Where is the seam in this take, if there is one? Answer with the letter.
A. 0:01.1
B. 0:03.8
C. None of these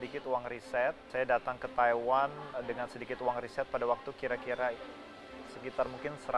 A